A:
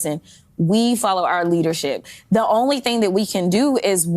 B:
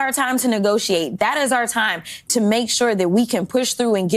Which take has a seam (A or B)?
A